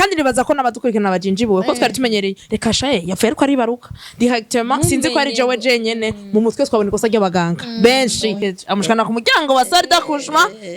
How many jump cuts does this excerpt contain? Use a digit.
1